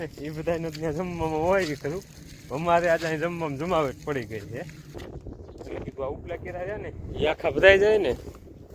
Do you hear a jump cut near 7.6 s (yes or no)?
no